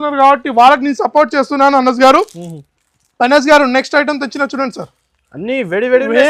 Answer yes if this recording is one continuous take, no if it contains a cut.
yes